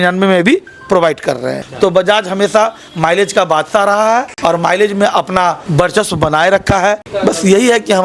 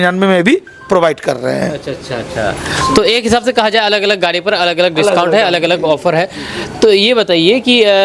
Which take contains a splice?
first; 4 cuts; at 1.6 s, 4.3 s, 5.6 s, 7.1 s

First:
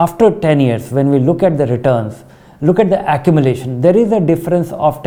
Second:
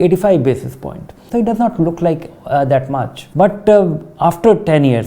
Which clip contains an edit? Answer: second; 2 cuts; at 1.2 s, 3.2 s

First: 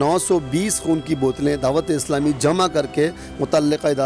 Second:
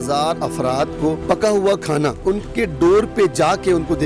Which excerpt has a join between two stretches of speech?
second; 2 cuts; at 1.2 s, 2.2 s

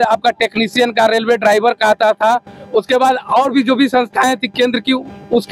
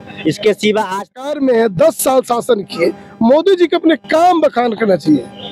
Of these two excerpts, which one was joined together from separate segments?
second; 1 cut; at 1.2 s

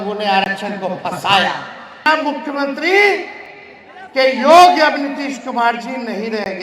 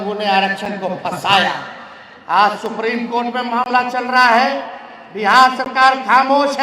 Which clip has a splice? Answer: first; 1 cut; at 2.0 s

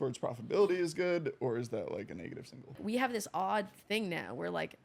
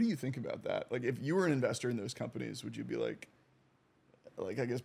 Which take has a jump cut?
first; 1 cut; at 2.8 s

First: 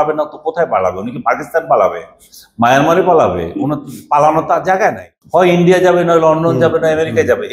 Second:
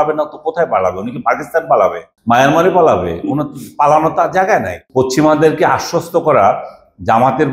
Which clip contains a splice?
second; 2 cuts; at 2.1 s, 4.8 s

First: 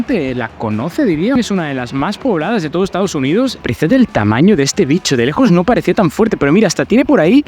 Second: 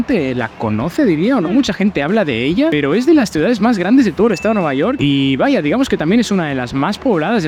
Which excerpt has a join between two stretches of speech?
first; 2 cuts; at 1.4 s, 3.6 s

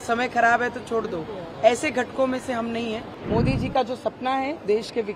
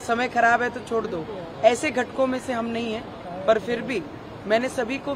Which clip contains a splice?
first; 1 cut; at 3.1 s

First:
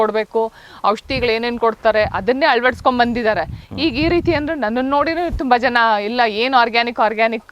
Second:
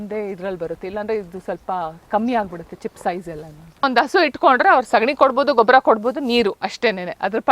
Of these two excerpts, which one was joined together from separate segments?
second; 1 cut; at 3.8 s

